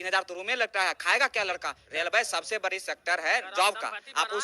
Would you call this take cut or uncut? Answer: cut